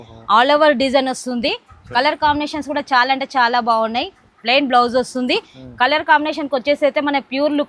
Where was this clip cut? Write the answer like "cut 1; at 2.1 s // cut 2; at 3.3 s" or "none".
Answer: none